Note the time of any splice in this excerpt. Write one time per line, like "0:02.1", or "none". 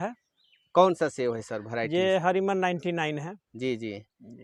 none